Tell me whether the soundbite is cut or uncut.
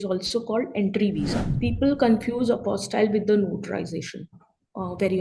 cut